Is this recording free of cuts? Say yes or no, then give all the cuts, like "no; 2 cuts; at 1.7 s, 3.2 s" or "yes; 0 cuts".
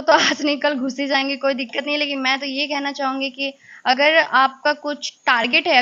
yes; 0 cuts